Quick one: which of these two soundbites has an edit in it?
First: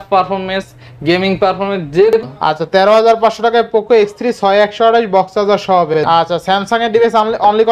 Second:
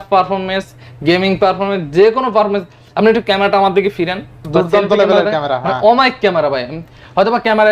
first; 2 cuts; at 2.2 s, 6.0 s

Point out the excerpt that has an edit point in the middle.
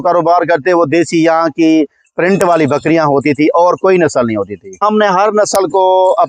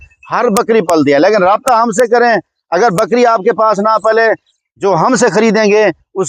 first; 1 cut; at 4.8 s

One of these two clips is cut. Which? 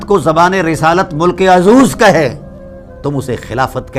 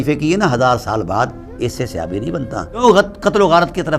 second; 1 cut; at 2.8 s

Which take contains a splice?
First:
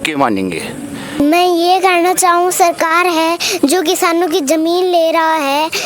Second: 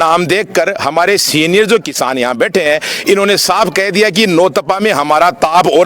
first; 1 cut; at 1.2 s

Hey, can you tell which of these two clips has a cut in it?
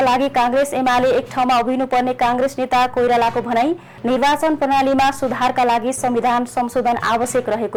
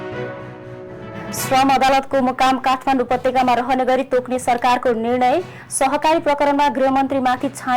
second; 1 cut; at 1.1 s

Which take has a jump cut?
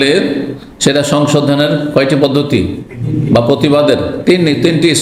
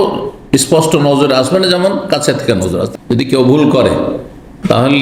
second; 1 cut; at 2.9 s

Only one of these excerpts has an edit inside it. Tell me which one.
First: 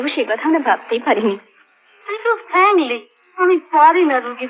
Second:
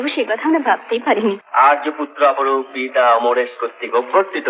second; 1 cut; at 1.4 s

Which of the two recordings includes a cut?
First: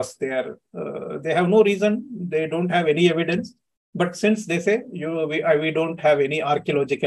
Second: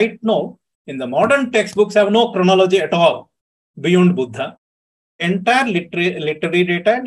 second; 1 cut; at 4.9 s

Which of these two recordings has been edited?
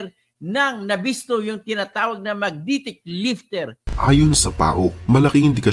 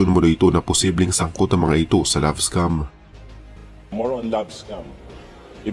first; 1 cut; at 3.8 s

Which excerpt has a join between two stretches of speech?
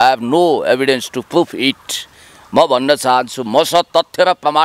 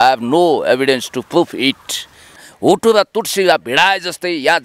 second; 1 cut; at 2.4 s

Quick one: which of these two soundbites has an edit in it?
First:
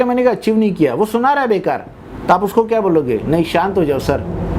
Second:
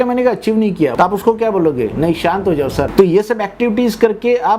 second; 2 cuts; at 0.9 s, 2.9 s

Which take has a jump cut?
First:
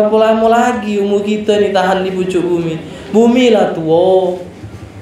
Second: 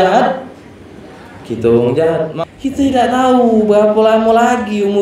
second; 1 cut; at 2.4 s

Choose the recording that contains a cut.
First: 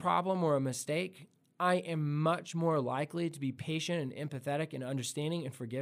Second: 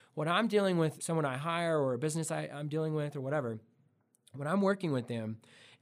second; 1 cut; at 1.0 s

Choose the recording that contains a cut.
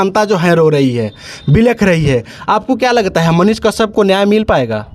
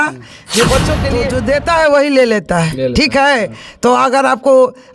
second; 1 cut; at 1.0 s

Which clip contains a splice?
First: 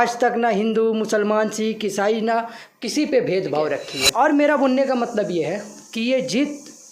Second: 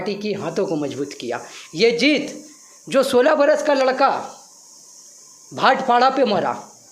first; 1 cut; at 4.0 s

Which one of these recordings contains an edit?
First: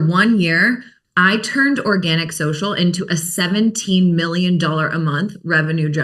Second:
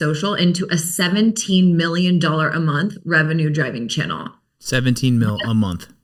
first; 1 cut; at 0.9 s

